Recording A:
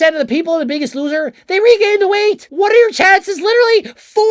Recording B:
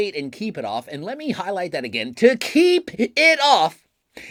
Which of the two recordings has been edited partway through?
A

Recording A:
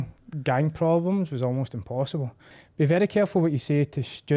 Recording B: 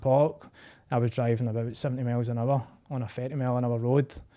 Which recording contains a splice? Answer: A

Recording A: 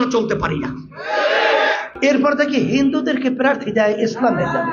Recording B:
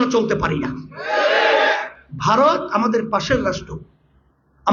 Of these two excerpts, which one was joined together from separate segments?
A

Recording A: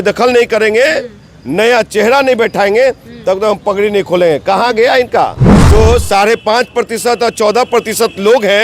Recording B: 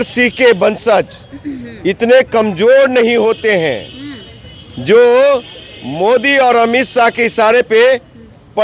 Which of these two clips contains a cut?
A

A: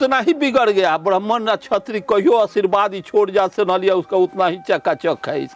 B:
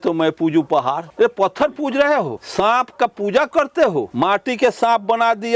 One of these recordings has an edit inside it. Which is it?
B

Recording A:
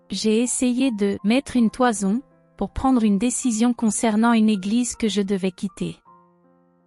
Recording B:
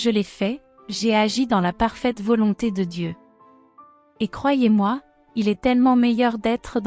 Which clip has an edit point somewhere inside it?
A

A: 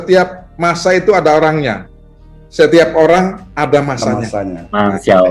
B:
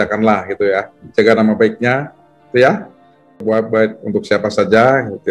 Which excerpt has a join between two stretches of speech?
B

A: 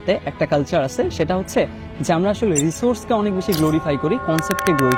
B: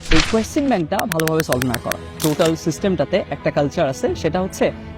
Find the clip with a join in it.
B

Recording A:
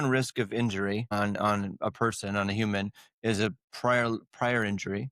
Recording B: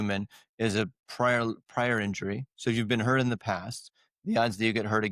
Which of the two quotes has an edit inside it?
A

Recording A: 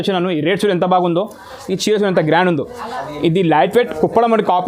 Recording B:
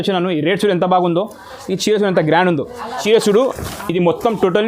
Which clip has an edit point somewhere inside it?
B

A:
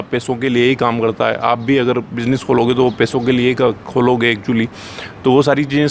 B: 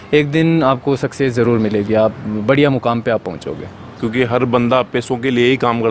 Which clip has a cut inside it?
B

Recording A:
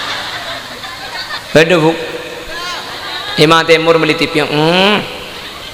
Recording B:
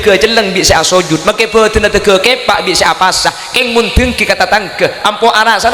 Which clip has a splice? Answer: A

